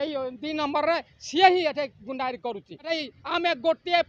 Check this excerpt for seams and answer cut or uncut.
cut